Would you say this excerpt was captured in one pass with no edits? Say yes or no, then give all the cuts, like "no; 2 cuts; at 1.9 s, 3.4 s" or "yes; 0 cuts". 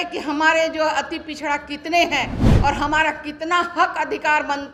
yes; 0 cuts